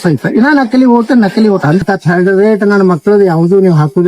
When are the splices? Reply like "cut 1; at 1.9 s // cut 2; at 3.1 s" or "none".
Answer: cut 1; at 1.8 s